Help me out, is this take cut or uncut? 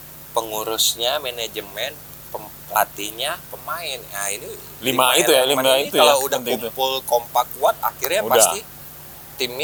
uncut